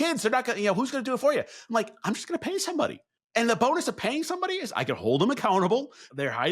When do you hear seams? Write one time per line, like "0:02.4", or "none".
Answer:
0:03.1